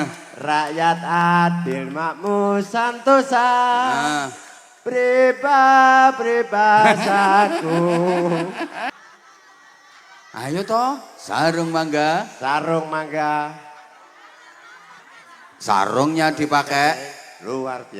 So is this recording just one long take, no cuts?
no; 1 cut; at 8.9 s

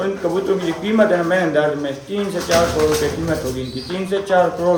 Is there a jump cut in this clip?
no; 0 cuts

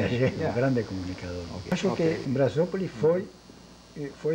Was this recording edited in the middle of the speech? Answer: yes; 1 cut; at 1.7 s

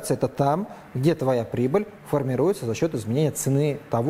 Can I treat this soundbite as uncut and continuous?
yes; 0 cuts

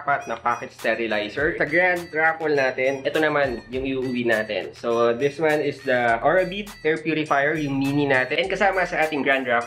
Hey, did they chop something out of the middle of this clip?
yes; 3 cuts; at 1.6 s, 3.0 s, 8.3 s

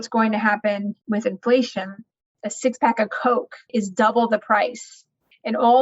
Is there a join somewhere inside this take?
yes; 3 cuts; at 0.9 s, 2.2 s, 3.7 s

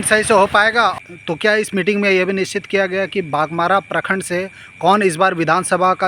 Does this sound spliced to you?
yes; 1 cut; at 1.0 s

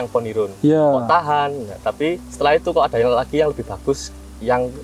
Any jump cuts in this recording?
no; 0 cuts

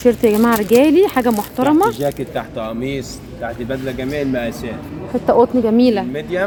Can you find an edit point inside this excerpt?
no; 0 cuts

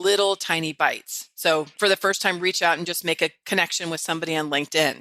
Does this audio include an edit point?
yes; 1 cut; at 1.7 s

